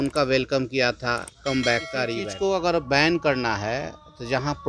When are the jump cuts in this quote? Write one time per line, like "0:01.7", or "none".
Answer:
0:02.3